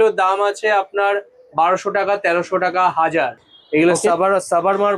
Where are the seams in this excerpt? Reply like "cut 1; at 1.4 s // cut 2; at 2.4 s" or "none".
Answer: cut 1; at 3.5 s